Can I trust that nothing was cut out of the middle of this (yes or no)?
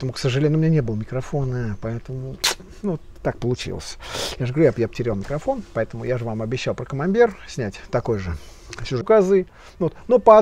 no